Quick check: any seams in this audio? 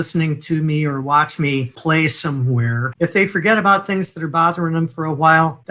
yes; 1 cut; at 2.9 s

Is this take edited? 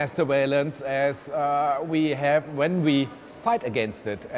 no; 0 cuts

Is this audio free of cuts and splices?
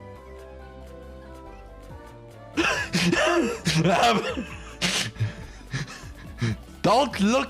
yes; 0 cuts

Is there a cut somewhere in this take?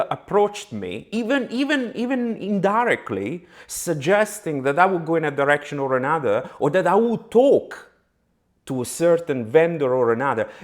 no; 0 cuts

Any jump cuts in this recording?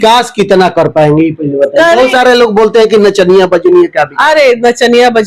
no; 0 cuts

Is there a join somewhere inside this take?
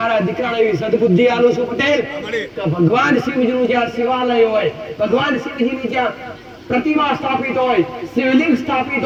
no; 0 cuts

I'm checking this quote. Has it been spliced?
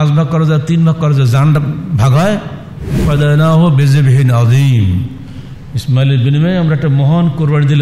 yes; 1 cut; at 3.0 s

